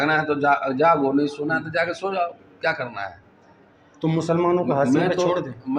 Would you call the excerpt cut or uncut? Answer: uncut